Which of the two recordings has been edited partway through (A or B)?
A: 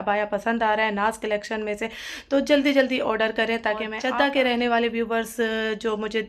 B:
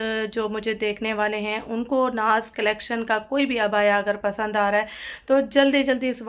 A